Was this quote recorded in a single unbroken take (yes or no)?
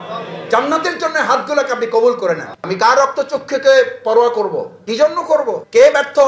no